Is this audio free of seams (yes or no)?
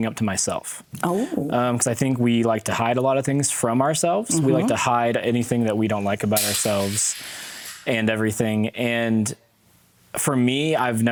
yes